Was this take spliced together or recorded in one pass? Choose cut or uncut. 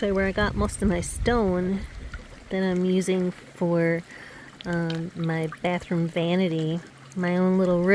cut